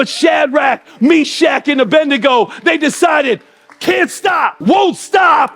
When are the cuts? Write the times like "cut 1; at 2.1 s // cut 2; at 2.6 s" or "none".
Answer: cut 1; at 4.6 s